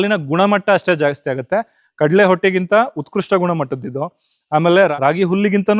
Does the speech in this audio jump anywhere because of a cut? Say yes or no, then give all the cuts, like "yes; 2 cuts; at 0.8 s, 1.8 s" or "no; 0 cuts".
yes; 1 cut; at 1.8 s